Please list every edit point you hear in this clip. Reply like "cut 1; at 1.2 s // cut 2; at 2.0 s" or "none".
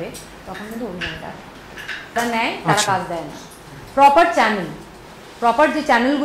cut 1; at 2.2 s